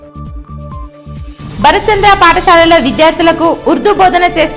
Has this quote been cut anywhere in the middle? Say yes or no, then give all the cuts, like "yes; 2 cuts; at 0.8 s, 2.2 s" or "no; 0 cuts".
yes; 1 cut; at 1.0 s